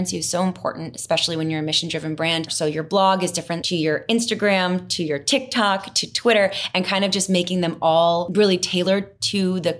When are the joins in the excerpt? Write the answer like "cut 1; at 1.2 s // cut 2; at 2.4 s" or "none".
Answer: cut 1; at 2.5 s // cut 2; at 3.5 s // cut 3; at 8.3 s